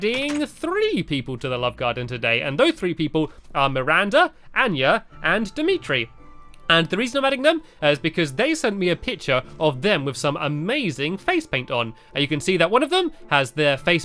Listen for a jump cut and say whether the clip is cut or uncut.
cut